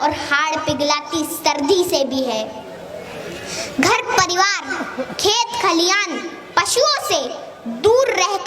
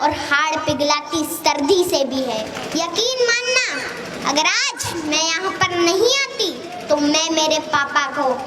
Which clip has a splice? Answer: second; 1 cut; at 2.6 s

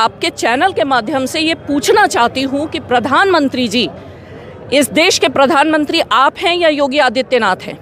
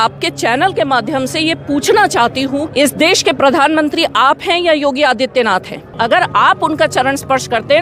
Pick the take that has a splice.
second; 2 cuts; at 2.7 s, 6.0 s

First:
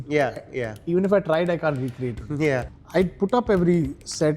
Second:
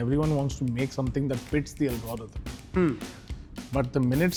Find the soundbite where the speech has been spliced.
first; 1 cut; at 2.8 s

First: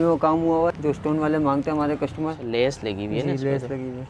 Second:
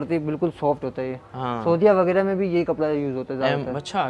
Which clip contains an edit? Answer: first; 2 cuts; at 0.8 s, 2.4 s

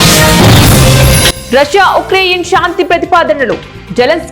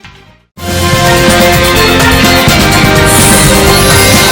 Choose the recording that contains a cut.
first; 1 cut; at 1.2 s

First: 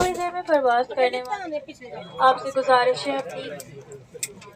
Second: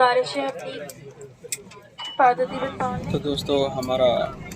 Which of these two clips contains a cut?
second; 1 cut; at 2.9 s

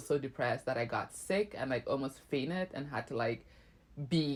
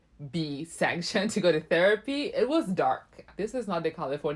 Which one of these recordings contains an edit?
second; 1 cut; at 3.3 s

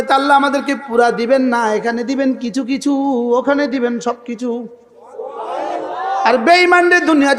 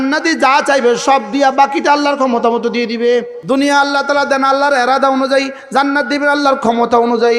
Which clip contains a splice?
second; 1 cut; at 3.3 s

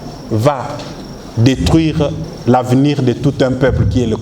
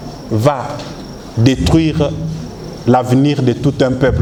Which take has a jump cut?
first; 1 cut; at 2.3 s

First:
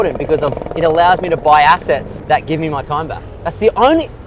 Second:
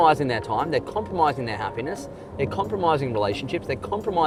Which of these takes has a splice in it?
first; 1 cut; at 2.1 s

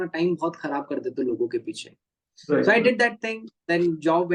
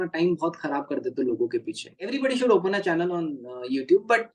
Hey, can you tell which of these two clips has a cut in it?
second; 1 cut; at 2.1 s

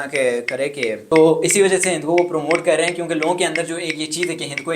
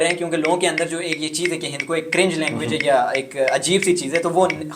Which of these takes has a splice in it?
first; 1 cut; at 1.0 s

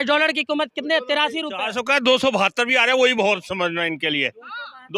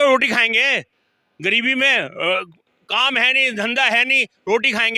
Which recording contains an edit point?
first; 1 cut; at 1.5 s

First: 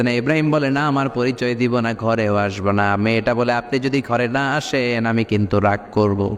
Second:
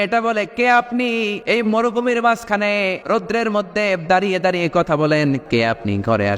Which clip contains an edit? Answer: second; 3 cuts; at 1.4 s, 3.0 s, 5.4 s

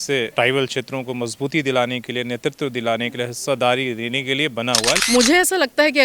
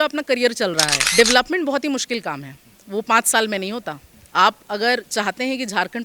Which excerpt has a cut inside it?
first; 1 cut; at 5.0 s

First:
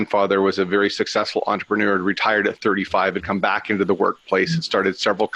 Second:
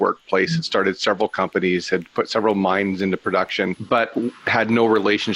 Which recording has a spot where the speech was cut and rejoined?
second; 1 cut; at 3.8 s

